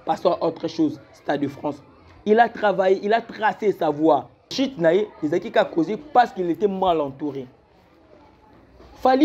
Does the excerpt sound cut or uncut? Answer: cut